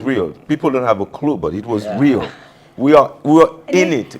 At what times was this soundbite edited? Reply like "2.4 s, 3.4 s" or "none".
none

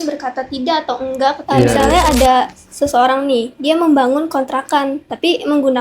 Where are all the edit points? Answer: 1.8 s

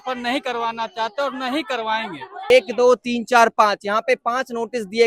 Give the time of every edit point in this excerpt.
2.5 s

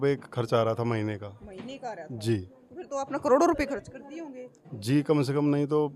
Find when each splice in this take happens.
none

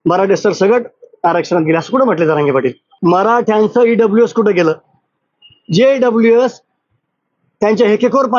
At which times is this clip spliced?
2.9 s

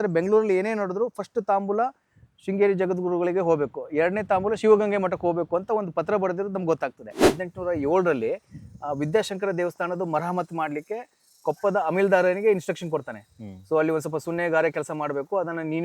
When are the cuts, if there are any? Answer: 7.3 s

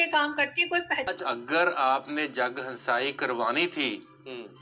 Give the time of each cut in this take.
1.1 s

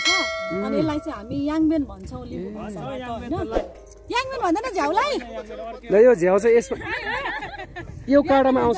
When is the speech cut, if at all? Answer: 5.3 s

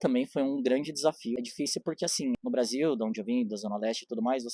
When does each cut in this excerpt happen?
1.4 s, 2.4 s

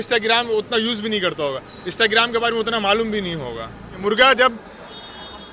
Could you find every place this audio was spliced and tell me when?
4.0 s

